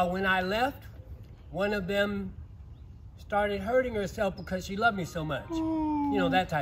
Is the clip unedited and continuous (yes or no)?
yes